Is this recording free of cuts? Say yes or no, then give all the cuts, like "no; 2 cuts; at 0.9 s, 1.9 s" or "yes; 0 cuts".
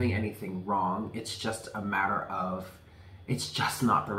yes; 0 cuts